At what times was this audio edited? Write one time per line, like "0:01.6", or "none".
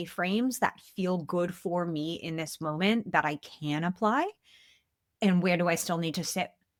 none